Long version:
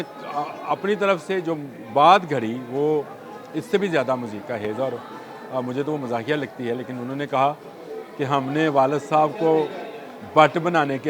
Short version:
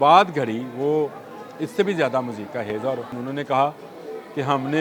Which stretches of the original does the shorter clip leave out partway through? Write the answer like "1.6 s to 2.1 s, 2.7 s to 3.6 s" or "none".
5.1 s to 7.0 s